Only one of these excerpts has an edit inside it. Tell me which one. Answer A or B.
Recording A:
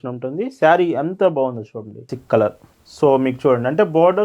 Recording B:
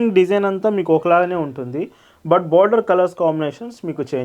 A